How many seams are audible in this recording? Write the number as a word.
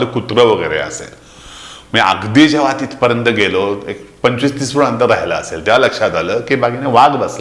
zero